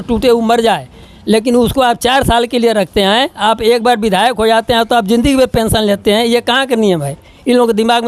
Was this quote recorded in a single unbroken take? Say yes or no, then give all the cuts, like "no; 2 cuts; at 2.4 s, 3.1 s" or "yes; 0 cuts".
yes; 0 cuts